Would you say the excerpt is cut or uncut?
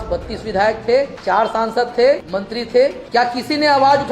cut